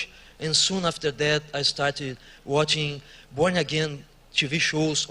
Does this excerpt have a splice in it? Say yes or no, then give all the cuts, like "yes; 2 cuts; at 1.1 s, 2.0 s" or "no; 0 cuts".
yes; 1 cut; at 2.4 s